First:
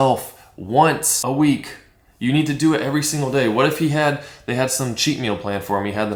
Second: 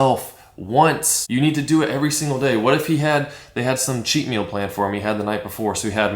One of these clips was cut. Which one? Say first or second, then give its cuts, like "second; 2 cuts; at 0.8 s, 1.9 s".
second; 1 cut; at 1.1 s